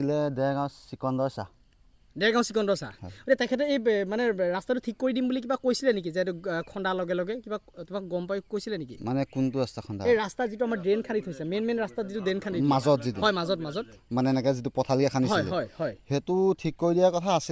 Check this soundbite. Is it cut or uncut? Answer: uncut